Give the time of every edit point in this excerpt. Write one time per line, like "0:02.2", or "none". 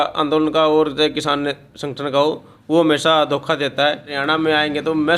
0:04.2